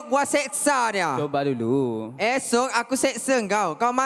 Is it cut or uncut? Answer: uncut